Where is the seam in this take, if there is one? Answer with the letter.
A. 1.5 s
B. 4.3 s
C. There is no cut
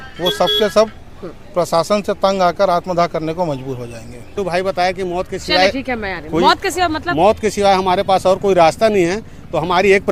B